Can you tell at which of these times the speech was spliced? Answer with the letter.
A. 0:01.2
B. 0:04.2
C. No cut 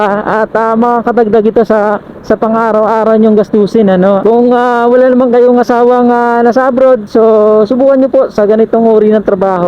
B